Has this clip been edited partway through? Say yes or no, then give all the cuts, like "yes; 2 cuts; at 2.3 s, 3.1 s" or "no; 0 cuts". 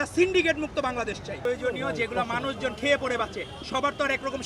yes; 1 cut; at 1.4 s